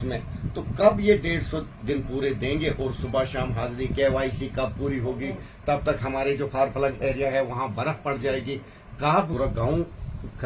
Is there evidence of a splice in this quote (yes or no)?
yes